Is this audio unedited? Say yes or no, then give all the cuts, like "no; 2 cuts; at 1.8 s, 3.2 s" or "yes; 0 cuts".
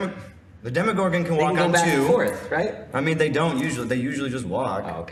yes; 0 cuts